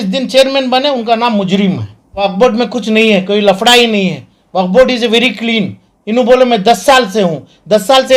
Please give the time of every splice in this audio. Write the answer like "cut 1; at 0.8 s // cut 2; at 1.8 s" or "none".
cut 1; at 2.2 s